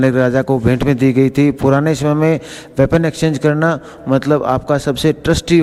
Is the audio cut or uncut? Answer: uncut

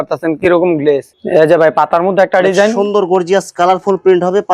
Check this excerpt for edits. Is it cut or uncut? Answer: cut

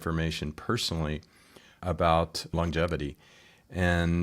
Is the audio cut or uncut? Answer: cut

